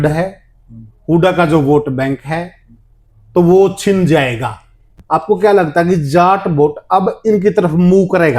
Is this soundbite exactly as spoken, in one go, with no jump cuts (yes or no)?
no